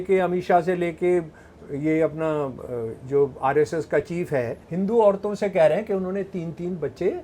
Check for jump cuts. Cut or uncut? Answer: cut